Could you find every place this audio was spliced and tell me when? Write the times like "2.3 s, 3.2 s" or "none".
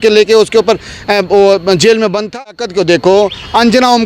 2.4 s

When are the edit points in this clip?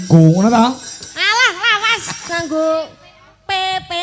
2.2 s

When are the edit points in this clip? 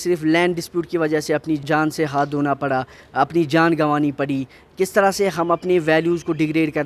1.6 s

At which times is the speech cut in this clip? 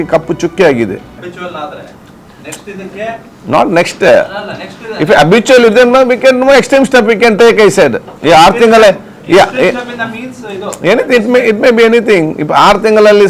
1.2 s

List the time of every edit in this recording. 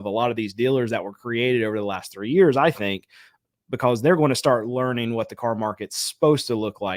none

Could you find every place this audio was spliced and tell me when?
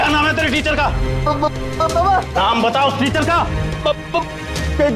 none

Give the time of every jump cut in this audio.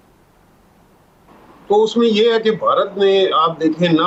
none

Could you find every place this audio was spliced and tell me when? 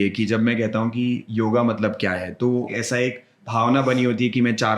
2.7 s

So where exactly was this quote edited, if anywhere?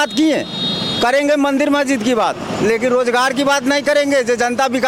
none

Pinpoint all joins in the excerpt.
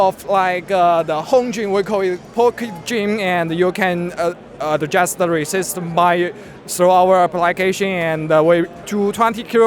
8.8 s

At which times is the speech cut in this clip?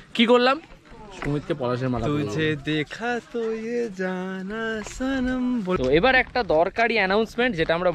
5.8 s

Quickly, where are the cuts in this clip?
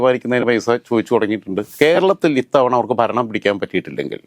1.7 s

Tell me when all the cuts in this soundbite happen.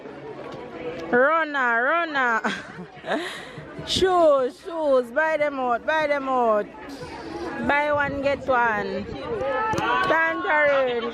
none

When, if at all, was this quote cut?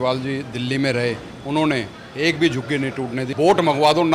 3.2 s

